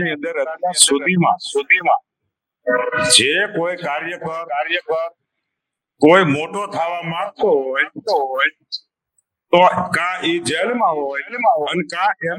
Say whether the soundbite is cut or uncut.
uncut